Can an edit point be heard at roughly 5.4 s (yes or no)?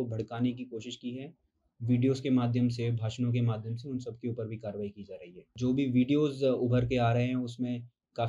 yes